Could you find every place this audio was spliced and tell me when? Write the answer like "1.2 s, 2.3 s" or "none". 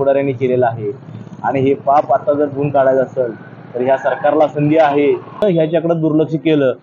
5.4 s